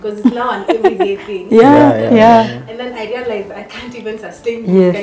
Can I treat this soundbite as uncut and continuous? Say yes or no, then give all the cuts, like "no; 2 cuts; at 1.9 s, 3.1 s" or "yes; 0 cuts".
yes; 0 cuts